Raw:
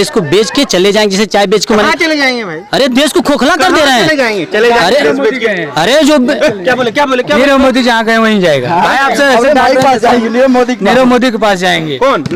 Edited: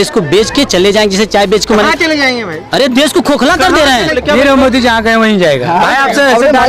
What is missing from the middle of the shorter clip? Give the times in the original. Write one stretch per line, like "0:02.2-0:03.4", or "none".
0:04.1-0:07.1